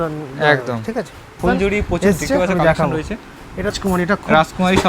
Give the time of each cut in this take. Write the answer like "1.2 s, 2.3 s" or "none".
1.4 s, 3.7 s

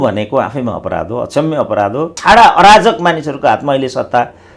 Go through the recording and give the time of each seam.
2.2 s

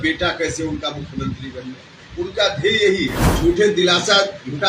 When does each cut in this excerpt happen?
3.2 s

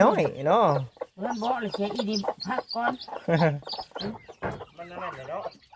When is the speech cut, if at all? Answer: 4.1 s

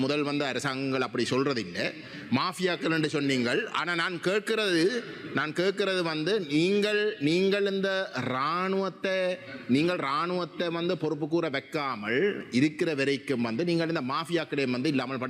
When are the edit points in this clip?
none

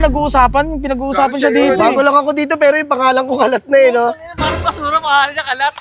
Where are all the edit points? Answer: none

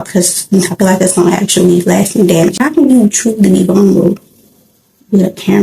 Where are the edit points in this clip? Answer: 2.6 s

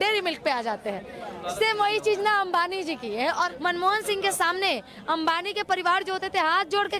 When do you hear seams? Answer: 3.5 s

